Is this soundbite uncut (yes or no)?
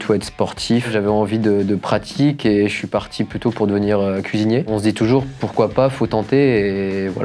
no